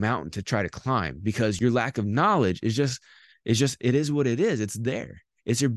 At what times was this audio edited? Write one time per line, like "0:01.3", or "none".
0:01.6